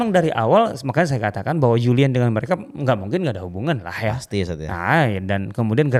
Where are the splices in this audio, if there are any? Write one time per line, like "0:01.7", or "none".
none